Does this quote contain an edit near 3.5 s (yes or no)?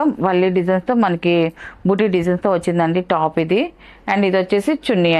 no